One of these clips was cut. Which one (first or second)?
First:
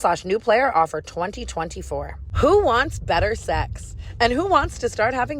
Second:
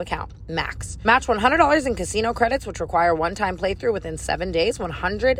first